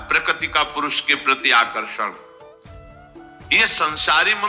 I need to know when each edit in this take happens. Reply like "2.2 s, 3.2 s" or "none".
none

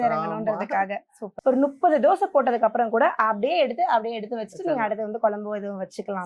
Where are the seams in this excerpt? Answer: 1.3 s

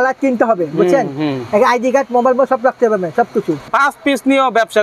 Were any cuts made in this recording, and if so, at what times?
3.7 s

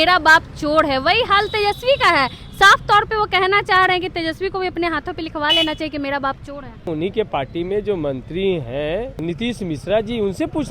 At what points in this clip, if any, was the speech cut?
6.9 s, 9.2 s

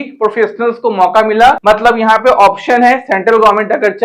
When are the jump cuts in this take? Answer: 1.6 s

